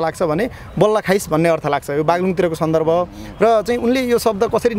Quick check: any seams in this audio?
no; 0 cuts

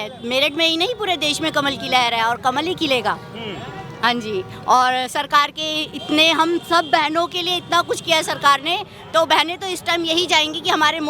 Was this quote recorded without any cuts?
yes; 0 cuts

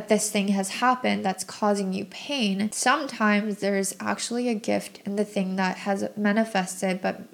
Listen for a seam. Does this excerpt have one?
no; 0 cuts

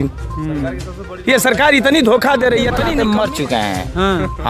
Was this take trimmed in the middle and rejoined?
yes; 1 cut; at 2.8 s

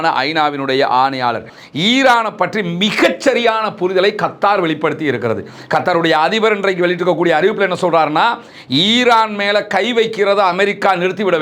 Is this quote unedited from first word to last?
no; 1 cut; at 1.5 s

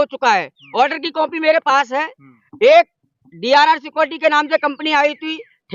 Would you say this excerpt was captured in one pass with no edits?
yes; 0 cuts

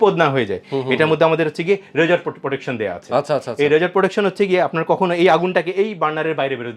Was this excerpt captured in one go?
yes; 0 cuts

